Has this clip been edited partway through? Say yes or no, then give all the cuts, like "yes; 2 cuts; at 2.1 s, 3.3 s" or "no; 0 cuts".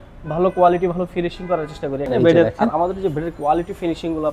yes; 1 cut; at 2.0 s